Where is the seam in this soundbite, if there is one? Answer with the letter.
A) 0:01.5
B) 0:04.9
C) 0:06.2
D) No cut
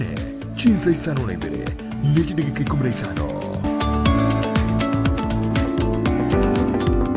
C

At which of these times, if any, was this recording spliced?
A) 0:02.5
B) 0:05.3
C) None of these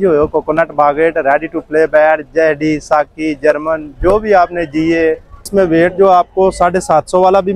B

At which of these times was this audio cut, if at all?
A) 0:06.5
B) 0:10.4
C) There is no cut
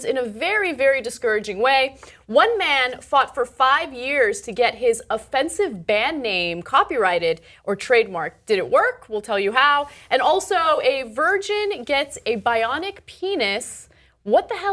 B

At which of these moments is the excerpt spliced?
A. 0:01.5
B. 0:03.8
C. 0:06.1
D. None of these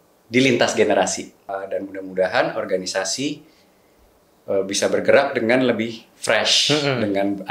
A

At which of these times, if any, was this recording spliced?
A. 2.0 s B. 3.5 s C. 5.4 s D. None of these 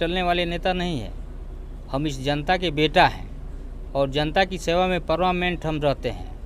D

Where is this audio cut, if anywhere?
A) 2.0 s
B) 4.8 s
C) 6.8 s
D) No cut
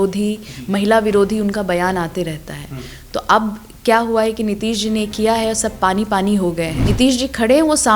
C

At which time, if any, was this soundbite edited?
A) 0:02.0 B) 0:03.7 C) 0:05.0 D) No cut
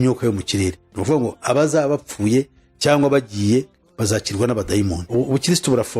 C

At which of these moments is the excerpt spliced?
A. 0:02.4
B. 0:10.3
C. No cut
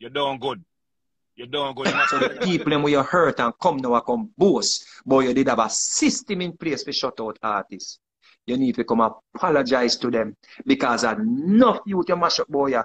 A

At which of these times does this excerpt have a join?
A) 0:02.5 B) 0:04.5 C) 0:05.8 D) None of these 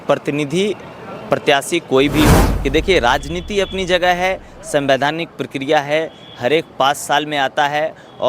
A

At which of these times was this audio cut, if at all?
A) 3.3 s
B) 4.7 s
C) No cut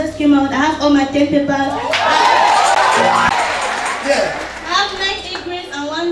A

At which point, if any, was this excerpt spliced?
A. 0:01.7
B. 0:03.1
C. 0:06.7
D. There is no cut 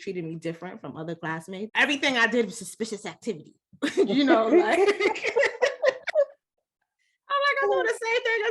A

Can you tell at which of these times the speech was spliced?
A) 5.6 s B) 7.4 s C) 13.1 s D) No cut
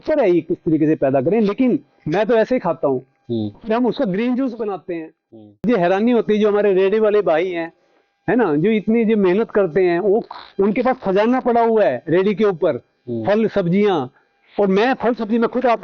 A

